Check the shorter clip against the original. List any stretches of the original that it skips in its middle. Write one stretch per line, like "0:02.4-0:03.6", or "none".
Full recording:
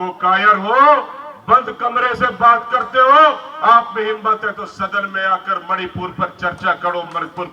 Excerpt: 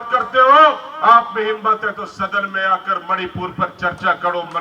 none

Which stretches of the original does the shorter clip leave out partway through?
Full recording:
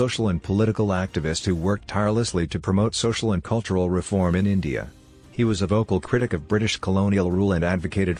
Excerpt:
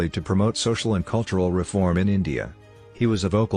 none

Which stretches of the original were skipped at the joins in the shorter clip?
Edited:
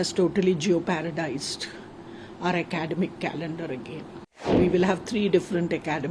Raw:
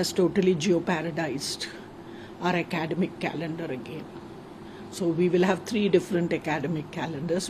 0:04.5-0:05.1

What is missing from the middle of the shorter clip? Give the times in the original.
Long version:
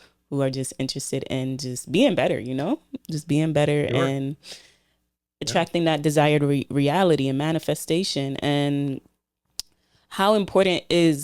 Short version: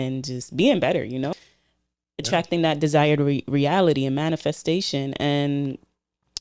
0:02.7-0:04.5

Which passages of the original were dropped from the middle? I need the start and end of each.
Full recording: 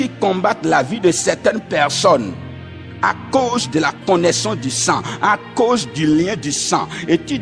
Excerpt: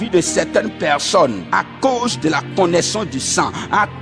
0:02.3-0:02.9

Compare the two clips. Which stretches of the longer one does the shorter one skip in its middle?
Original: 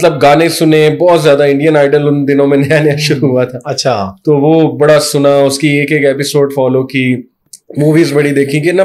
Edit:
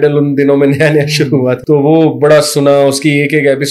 0:03.5-0:04.2

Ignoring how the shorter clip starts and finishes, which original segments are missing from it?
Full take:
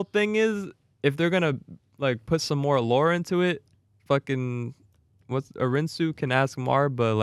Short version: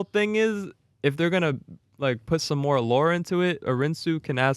0:03.6-0:05.5

